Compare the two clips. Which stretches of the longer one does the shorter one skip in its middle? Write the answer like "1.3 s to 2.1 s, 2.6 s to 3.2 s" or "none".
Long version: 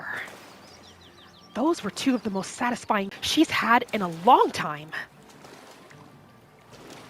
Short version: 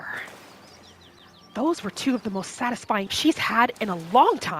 3.1 s to 3.2 s